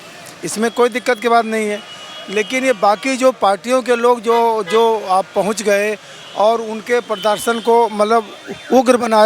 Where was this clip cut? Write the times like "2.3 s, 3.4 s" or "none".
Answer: none